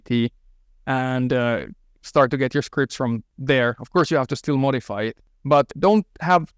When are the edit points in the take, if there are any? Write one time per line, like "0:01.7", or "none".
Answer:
0:03.3
0:05.6

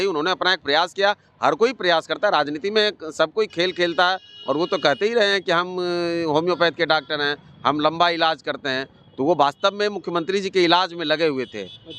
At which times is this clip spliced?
none

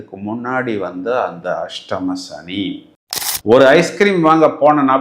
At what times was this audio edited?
0:03.3

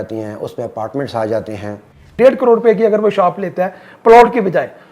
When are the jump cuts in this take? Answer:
0:02.1

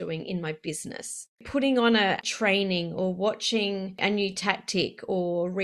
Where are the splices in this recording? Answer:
0:01.4
0:02.2
0:04.0

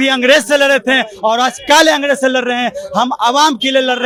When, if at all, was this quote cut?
none

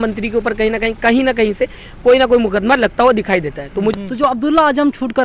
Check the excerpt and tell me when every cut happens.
0:03.9

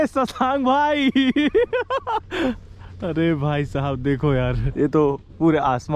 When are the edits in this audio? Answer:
0:04.7

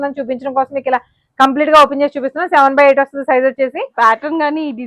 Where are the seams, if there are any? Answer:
0:03.8

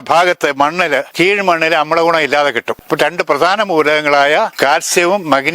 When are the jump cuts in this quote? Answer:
0:01.1
0:02.8
0:04.5

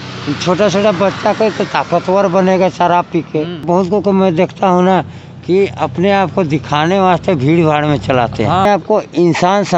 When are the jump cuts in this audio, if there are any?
0:03.6
0:08.7

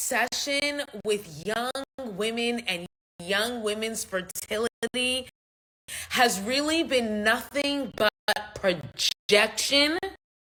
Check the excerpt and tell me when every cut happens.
none

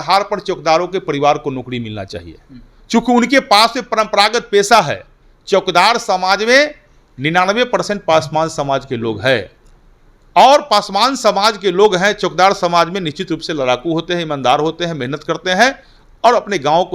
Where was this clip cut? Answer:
none

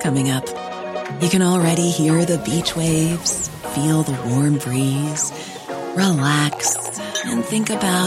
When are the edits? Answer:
none

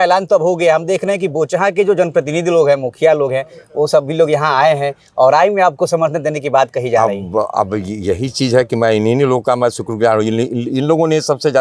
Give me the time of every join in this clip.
none

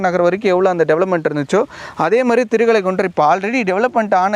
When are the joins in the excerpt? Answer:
none

